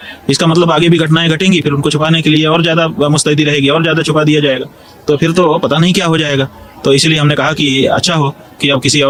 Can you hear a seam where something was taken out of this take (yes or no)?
no